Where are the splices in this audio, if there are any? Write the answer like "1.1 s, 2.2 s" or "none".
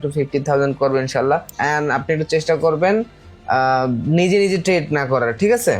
1.6 s